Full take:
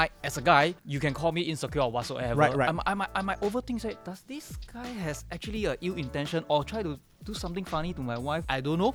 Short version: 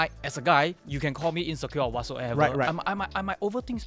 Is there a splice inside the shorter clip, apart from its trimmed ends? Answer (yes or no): no